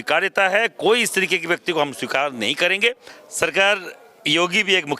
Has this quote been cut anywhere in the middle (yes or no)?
yes